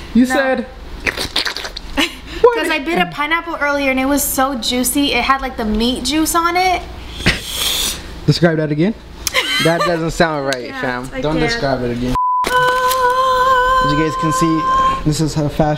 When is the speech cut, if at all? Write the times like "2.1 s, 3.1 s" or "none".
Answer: none